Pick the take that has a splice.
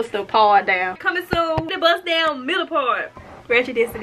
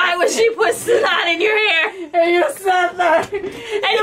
first; 1 cut; at 1.4 s

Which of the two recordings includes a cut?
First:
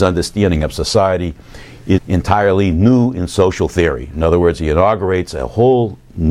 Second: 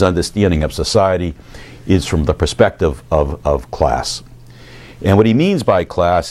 second; 1 cut; at 2.0 s

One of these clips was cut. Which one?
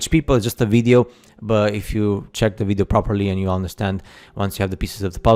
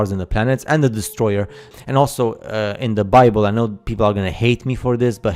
second; 1 cut; at 1.8 s

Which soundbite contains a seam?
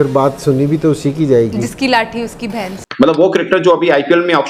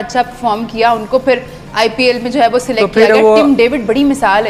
first; 1 cut; at 2.8 s

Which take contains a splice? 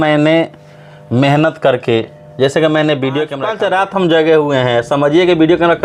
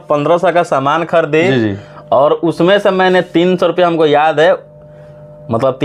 first; 1 cut; at 3.4 s

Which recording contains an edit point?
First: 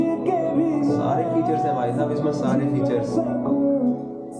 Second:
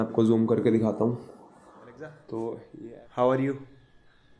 second; 1 cut; at 2.7 s

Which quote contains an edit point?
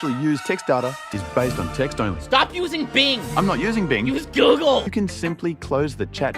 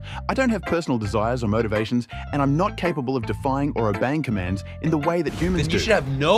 first; 2 cuts; at 1.0 s, 4.9 s

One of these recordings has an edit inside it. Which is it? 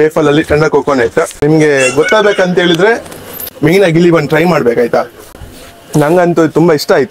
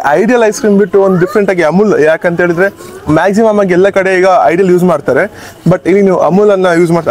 first; 1 cut; at 1.3 s

